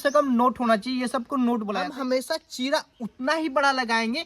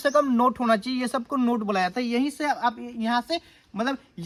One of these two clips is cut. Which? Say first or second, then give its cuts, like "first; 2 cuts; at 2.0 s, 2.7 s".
first; 1 cut; at 1.8 s